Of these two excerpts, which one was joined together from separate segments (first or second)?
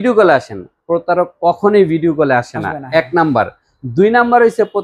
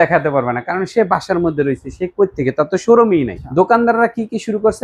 second